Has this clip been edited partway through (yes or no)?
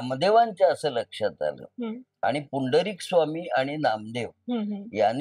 no